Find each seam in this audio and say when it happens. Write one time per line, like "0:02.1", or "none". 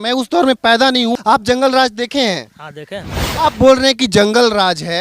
0:01.1
0:03.2